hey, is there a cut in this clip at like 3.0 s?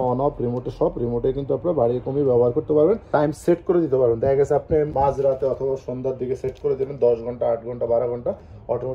no; 0 cuts

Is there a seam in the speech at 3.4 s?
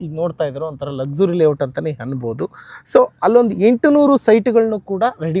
no; 0 cuts

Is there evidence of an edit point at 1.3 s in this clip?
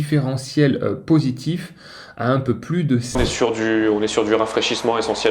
no; 1 cut; at 3.2 s

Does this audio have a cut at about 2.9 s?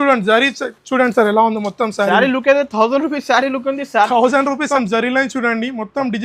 no; 1 cut; at 4.6 s

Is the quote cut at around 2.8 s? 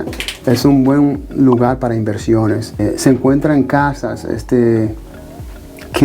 yes; 1 cut; at 2.8 s

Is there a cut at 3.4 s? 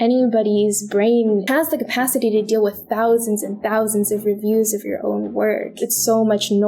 no; 2 cuts; at 1.5 s, 5.8 s

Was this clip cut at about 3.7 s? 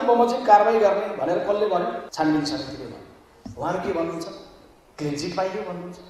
no; 1 cut; at 2.1 s

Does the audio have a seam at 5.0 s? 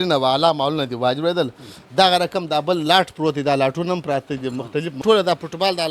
yes; 1 cut; at 5.0 s

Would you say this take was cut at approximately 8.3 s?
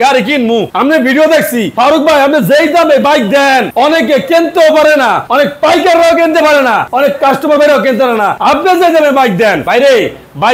yes; 4 cuts; at 5.2 s, 6.9 s, 8.3 s, 9.6 s

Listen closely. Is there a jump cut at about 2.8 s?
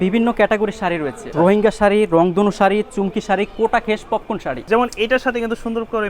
no; 2 cuts; at 1.2 s, 4.5 s

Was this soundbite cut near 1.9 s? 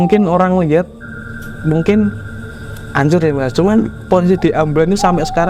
no; 0 cuts

